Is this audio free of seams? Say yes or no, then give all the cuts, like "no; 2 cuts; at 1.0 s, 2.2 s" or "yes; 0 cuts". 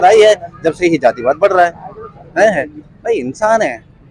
yes; 0 cuts